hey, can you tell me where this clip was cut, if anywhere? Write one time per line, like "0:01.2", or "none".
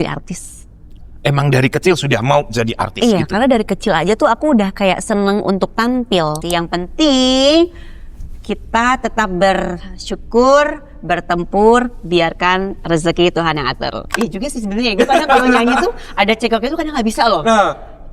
0:06.4
0:14.0